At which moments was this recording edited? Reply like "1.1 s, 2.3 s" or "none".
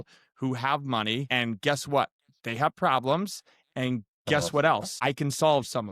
1.3 s, 4.9 s